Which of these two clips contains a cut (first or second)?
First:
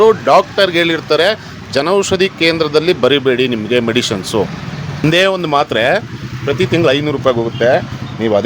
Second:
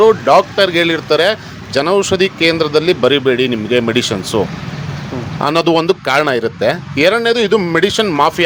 first